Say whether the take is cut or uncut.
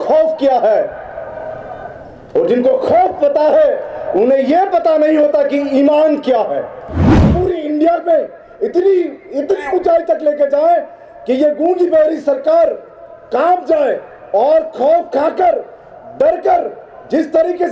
cut